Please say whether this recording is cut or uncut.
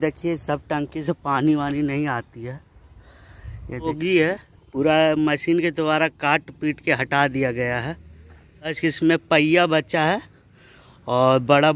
cut